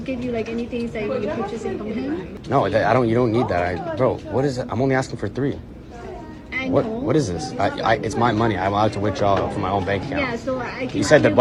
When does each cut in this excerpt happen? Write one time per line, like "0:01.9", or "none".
0:02.3